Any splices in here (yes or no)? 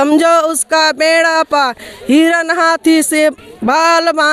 no